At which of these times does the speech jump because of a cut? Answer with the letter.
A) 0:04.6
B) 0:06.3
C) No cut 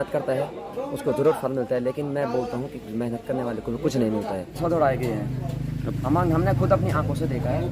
A